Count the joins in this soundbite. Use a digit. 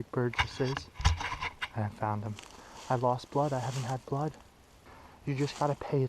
2